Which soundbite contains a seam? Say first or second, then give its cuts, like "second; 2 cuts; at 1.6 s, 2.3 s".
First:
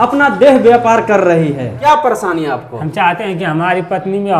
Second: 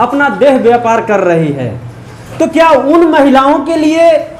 first; 1 cut; at 1.8 s